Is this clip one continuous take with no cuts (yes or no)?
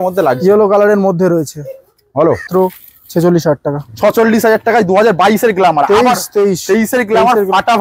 no